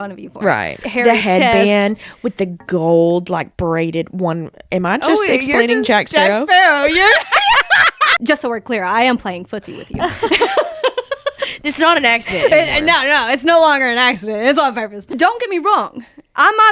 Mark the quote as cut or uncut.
cut